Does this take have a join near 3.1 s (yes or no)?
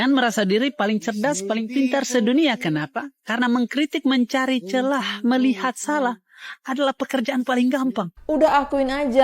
no